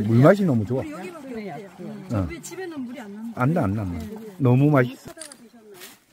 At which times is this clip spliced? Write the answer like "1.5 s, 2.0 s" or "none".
5.0 s